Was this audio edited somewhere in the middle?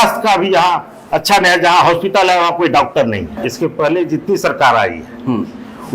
yes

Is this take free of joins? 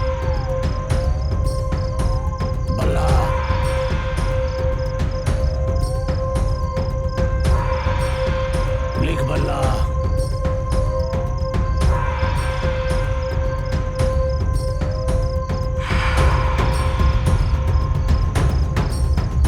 yes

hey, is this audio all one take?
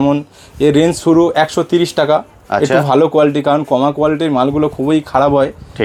yes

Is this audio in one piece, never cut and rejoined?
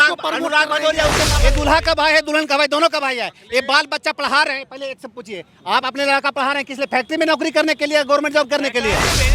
no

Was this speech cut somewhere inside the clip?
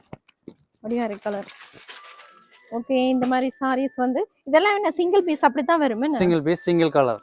no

